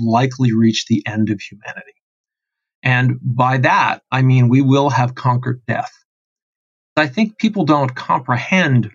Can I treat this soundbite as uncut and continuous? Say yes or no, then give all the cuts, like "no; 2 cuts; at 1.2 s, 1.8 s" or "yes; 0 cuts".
no; 1 cut; at 7.0 s